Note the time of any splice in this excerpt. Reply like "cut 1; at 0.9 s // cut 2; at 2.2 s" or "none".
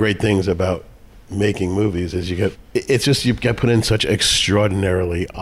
cut 1; at 2.6 s